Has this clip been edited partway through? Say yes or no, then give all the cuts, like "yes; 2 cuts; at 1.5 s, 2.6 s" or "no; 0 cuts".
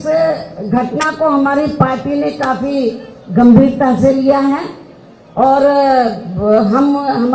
no; 0 cuts